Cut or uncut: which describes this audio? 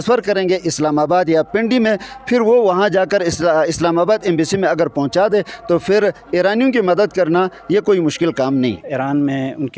cut